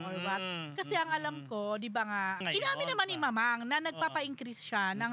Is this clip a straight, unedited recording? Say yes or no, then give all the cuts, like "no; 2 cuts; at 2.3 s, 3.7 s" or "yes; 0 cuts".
no; 1 cut; at 2.4 s